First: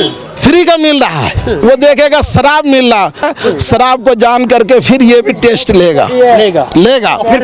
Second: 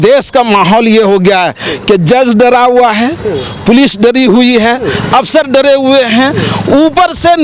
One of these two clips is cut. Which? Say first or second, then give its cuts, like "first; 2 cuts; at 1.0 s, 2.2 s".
first; 2 cuts; at 1.6 s, 3.2 s